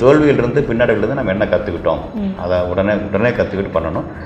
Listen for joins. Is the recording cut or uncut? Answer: uncut